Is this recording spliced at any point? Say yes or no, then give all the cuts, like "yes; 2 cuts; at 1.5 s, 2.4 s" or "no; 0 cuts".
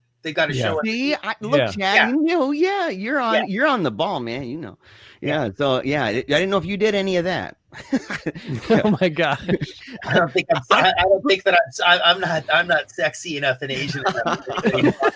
no; 0 cuts